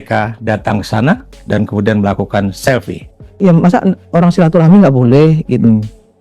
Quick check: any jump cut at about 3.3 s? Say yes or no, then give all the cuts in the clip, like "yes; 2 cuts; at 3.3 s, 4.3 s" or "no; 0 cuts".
yes; 1 cut; at 3.3 s